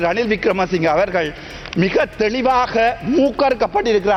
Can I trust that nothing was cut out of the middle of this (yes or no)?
yes